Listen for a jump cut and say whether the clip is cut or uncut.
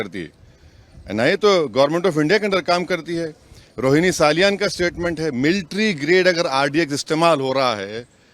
uncut